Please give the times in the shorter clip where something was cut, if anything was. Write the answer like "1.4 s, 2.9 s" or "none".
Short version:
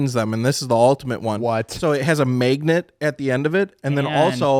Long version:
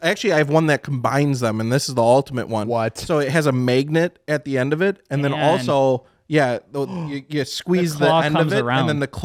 none